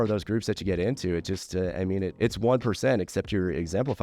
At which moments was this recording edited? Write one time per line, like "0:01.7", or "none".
0:02.1